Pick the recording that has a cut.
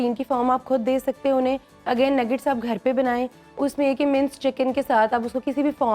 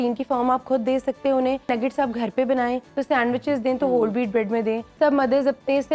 second; 3 cuts; at 1.7 s, 2.9 s, 4.9 s

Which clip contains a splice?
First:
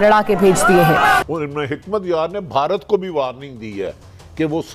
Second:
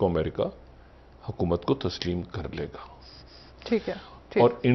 first; 1 cut; at 1.2 s

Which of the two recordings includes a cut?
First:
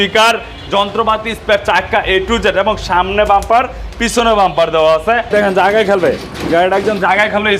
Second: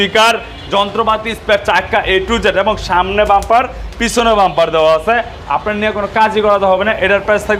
first; 1 cut; at 5.3 s

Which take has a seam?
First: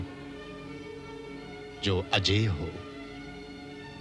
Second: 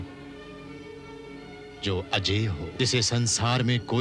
second; 1 cut; at 2.7 s

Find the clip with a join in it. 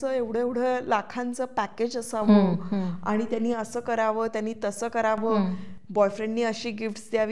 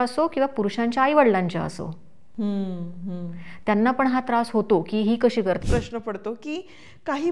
second; 1 cut; at 5.6 s

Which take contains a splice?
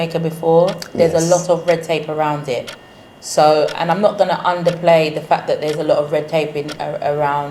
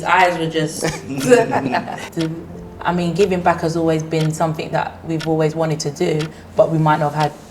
second; 1 cut; at 2.0 s

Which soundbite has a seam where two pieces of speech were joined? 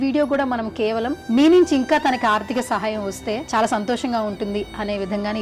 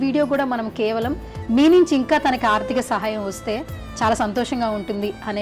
first; 2 cuts; at 1.2 s, 3.4 s

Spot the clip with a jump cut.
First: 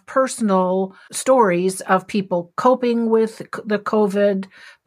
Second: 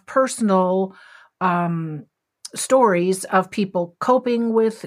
first; 1 cut; at 1.0 s

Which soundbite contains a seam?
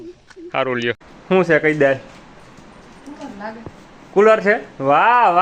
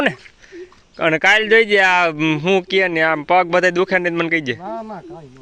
first; 1 cut; at 1.1 s

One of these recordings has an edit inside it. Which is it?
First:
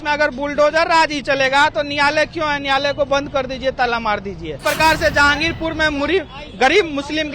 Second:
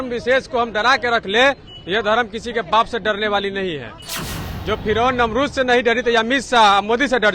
first; 1 cut; at 4.6 s

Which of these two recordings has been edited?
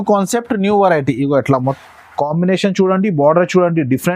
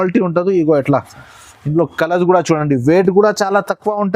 first; 1 cut; at 1.8 s

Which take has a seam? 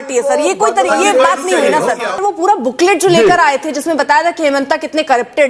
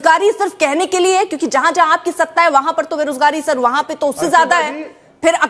first; 1 cut; at 2.1 s

